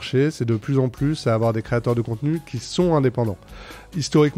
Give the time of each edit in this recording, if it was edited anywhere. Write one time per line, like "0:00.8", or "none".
none